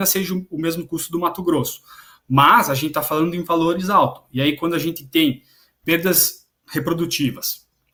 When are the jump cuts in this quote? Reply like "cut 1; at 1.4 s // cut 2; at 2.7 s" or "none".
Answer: none

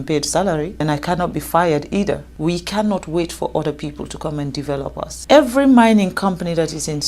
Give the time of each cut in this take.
cut 1; at 0.8 s // cut 2; at 2.3 s // cut 3; at 5.2 s

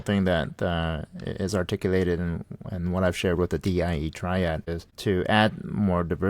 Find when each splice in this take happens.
cut 1; at 4.6 s

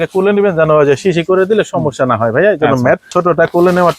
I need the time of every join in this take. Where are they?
cut 1; at 3.1 s

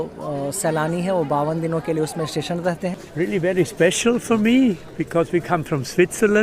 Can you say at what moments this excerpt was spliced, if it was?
cut 1; at 3.0 s

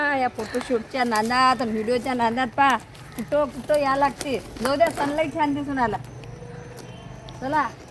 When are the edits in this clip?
none

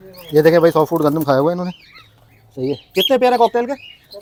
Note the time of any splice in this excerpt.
none

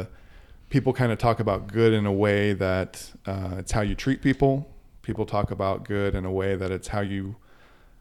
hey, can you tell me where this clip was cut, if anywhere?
none

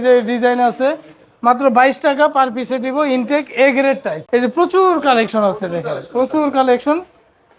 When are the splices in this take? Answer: cut 1; at 4.1 s

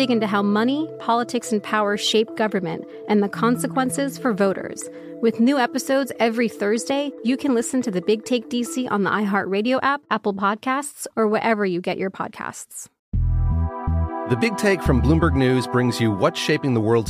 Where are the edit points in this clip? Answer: cut 1; at 13.0 s

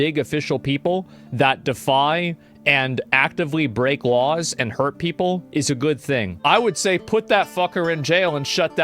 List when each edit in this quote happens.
cut 1; at 6.3 s

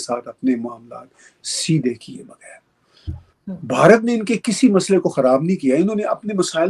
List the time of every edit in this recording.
none

